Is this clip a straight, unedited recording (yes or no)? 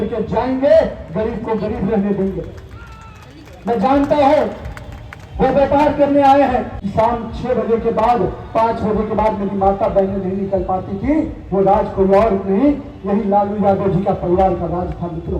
no